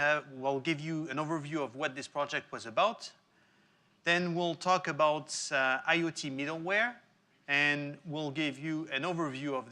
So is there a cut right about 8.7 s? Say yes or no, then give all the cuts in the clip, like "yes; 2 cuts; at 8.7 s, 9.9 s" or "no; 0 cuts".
no; 1 cut; at 5.1 s